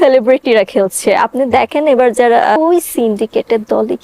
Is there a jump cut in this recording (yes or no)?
yes